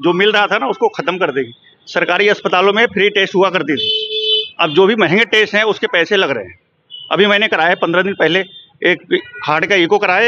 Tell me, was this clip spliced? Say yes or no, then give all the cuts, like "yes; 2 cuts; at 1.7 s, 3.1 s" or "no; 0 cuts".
no; 0 cuts